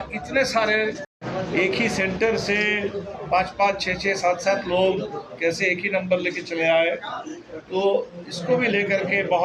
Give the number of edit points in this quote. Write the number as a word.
zero